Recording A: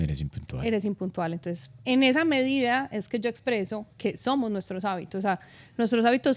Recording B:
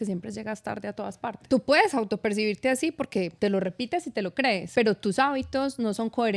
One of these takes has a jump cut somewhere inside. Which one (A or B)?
B